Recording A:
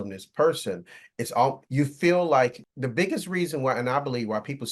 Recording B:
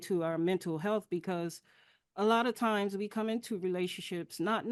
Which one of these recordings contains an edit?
A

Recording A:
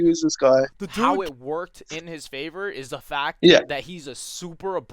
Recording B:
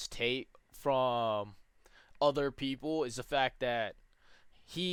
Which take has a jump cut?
A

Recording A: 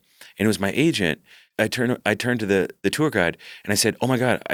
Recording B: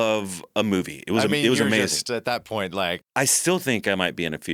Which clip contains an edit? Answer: B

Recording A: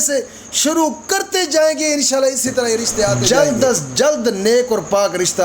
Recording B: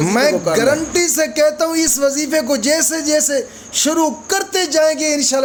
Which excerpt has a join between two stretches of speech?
A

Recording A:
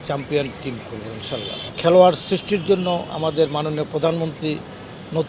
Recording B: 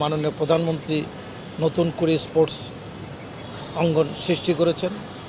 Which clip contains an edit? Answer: A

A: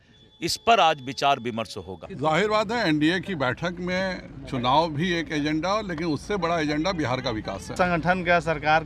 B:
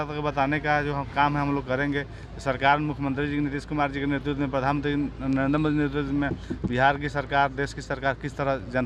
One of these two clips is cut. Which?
A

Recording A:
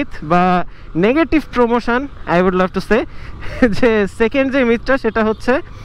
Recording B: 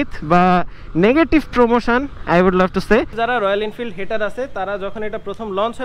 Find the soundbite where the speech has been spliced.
B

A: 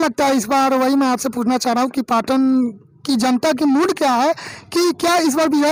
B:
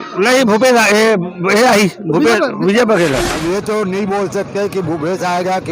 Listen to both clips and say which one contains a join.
B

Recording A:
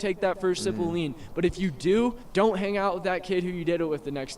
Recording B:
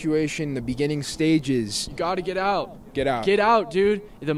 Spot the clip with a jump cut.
A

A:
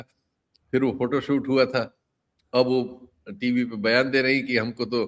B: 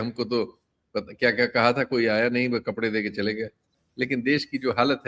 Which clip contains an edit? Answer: B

